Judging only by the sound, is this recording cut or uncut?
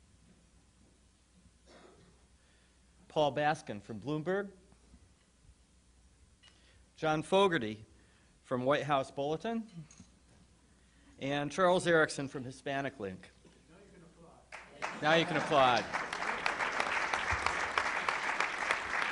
uncut